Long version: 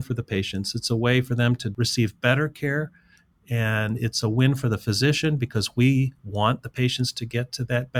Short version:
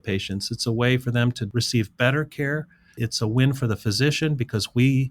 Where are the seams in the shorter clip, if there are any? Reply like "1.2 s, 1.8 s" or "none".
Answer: 3.0 s